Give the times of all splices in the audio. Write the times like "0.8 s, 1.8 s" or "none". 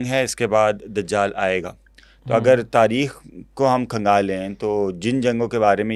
none